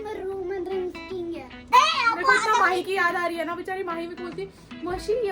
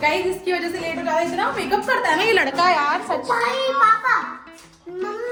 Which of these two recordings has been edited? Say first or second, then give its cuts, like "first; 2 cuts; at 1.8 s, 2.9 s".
first; 1 cut; at 1.7 s